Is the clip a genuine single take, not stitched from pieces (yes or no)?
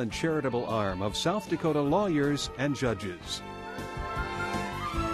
no